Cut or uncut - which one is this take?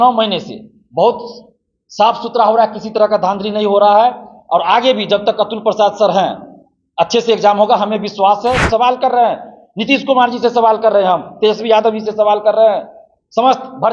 cut